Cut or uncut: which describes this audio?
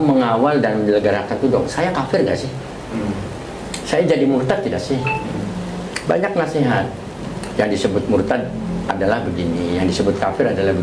uncut